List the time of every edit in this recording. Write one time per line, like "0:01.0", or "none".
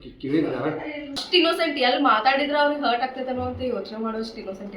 0:01.2